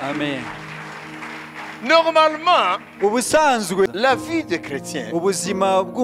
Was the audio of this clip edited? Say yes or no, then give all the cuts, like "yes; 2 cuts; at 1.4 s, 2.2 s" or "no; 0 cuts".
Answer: yes; 1 cut; at 3.9 s